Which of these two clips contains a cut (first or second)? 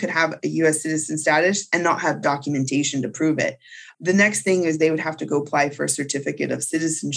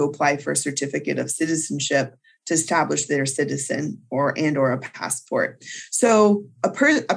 first